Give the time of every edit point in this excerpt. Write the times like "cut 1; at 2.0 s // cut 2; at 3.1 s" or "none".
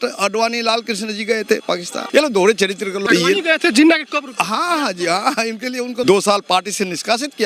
cut 1; at 2.0 s // cut 2; at 3.0 s // cut 3; at 6.0 s